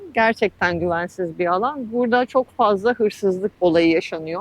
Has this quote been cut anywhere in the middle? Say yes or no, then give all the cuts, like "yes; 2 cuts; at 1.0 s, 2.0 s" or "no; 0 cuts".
yes; 1 cut; at 3.5 s